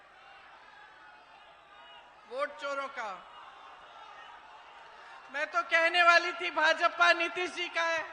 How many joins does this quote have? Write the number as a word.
one